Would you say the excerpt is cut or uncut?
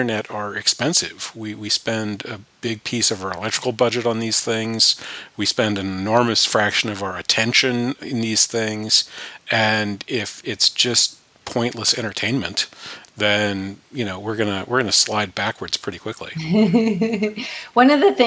uncut